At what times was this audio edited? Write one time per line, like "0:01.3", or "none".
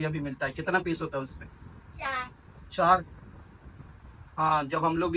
none